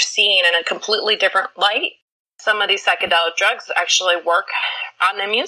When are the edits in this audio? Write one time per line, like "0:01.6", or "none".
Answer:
0:02.2